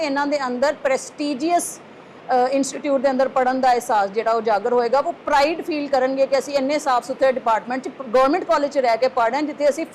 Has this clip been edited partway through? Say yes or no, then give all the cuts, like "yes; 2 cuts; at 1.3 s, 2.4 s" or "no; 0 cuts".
no; 0 cuts